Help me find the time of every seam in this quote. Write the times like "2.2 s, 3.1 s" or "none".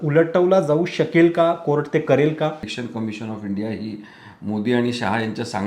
2.7 s